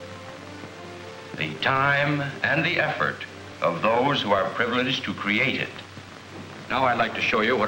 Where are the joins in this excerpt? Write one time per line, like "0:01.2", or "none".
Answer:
0:06.5